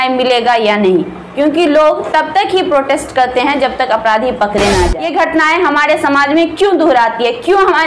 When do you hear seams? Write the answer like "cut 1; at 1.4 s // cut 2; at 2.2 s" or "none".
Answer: cut 1; at 4.9 s